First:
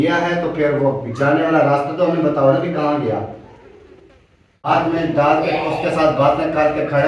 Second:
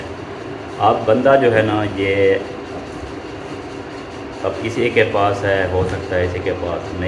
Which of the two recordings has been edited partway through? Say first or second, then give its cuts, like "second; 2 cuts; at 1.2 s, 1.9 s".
first; 1 cut; at 4.7 s